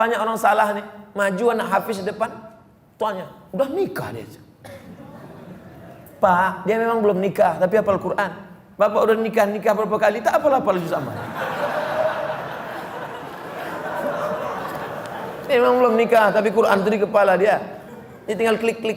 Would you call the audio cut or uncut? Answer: uncut